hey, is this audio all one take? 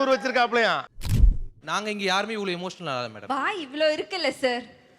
no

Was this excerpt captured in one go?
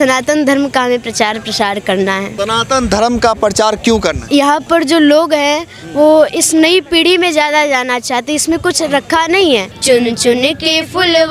no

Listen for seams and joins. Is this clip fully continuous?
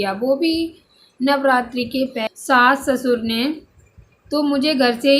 no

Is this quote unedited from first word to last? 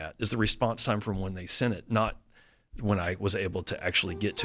yes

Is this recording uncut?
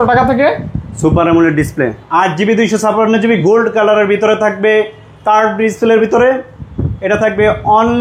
no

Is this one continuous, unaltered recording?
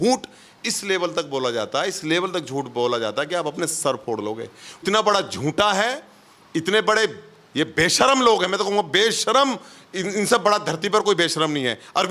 no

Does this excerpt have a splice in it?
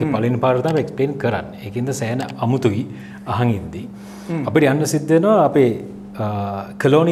no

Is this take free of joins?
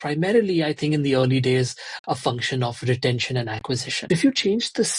no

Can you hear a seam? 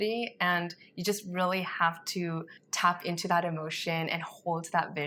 no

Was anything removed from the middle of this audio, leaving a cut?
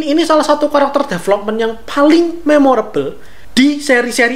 no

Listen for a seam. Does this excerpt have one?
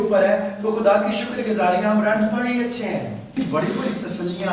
yes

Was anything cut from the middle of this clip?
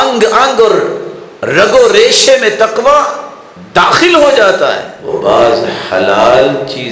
yes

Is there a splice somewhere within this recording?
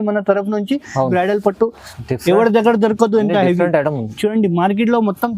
yes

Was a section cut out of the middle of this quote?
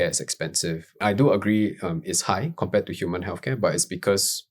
yes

